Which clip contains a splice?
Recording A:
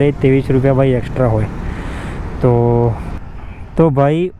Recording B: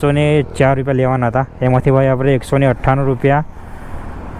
A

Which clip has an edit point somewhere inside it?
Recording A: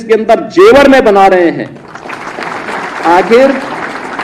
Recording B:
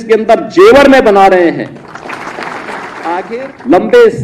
B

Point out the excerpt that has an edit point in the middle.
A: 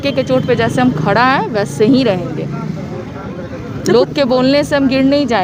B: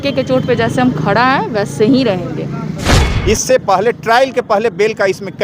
B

